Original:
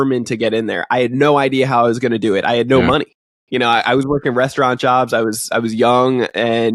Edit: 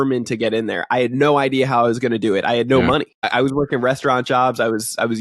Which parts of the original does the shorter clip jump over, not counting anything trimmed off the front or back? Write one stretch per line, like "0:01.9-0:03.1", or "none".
0:03.3-0:03.8